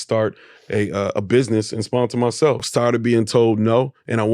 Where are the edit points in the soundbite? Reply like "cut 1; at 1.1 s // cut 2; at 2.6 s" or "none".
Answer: cut 1; at 2.6 s